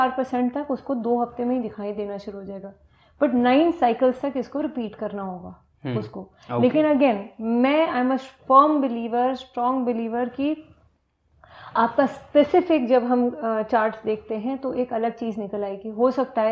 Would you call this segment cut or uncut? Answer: uncut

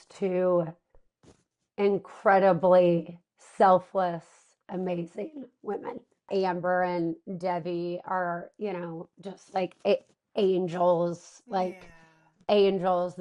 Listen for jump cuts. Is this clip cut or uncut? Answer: cut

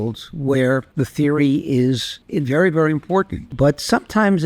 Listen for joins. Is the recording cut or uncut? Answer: cut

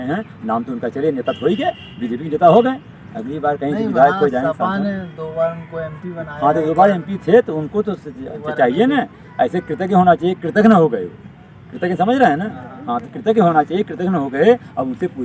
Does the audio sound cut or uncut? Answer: uncut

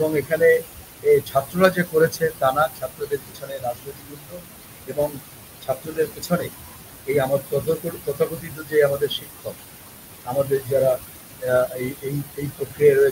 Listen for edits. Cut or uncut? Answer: uncut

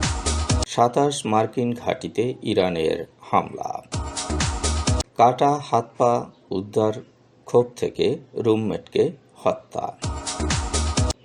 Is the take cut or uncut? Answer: uncut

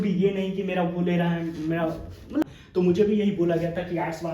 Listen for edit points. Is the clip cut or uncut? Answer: cut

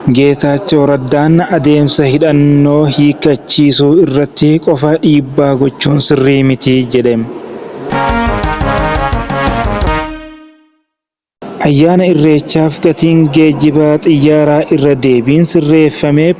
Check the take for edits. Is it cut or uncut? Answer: cut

